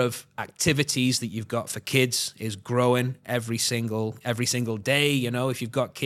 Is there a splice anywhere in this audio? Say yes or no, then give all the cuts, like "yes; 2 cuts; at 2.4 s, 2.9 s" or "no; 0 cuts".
no; 0 cuts